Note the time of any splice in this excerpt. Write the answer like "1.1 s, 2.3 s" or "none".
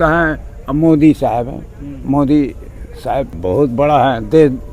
3.3 s